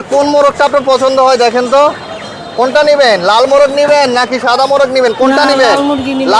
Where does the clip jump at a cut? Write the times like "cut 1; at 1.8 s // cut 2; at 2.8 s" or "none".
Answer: none

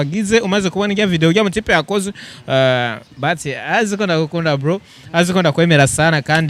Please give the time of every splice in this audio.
none

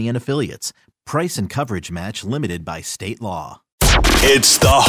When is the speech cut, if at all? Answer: cut 1; at 3.7 s

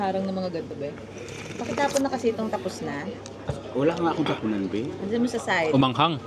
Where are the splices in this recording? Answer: none

